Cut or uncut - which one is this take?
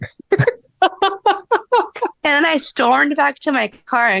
cut